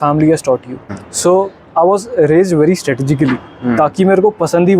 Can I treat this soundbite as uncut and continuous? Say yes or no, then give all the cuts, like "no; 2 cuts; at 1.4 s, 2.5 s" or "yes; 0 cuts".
no; 1 cut; at 1.0 s